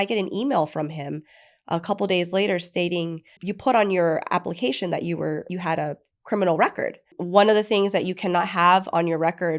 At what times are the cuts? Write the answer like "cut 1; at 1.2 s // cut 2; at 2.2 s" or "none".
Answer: cut 1; at 3.4 s // cut 2; at 5.5 s // cut 3; at 7.2 s

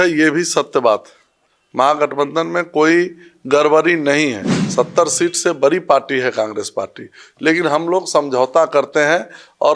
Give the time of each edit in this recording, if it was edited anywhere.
cut 1; at 4.5 s

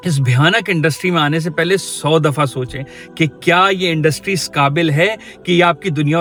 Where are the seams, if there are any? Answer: none

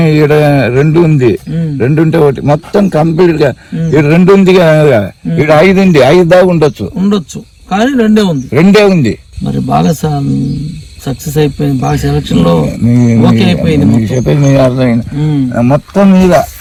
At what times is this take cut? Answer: none

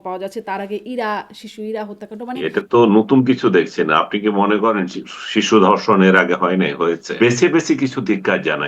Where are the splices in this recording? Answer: cut 1; at 2.3 s // cut 2; at 7.1 s

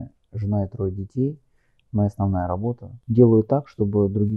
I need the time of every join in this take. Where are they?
cut 1; at 3.0 s

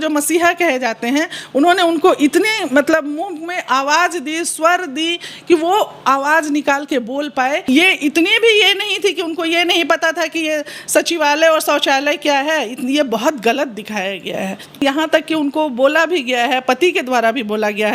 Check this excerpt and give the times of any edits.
cut 1; at 7.6 s // cut 2; at 14.8 s

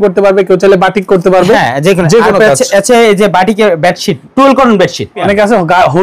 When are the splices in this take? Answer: cut 1; at 4.2 s // cut 2; at 5.2 s

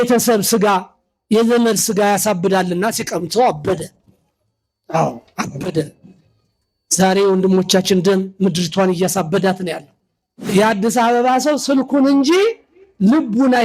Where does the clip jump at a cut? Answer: cut 1; at 10.5 s

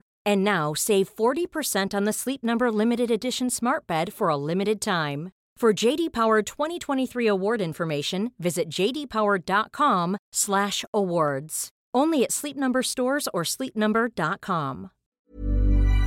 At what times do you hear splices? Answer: cut 1; at 15.1 s

